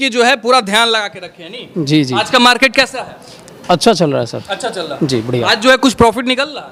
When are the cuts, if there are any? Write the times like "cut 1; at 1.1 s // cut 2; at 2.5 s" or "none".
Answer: none